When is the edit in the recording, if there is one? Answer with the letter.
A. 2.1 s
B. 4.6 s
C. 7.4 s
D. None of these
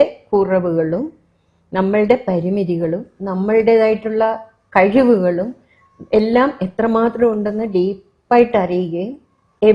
D